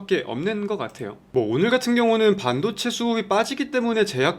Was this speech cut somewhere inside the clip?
yes; 1 cut; at 1.2 s

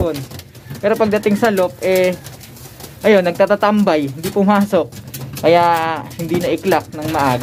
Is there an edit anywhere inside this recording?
no; 0 cuts

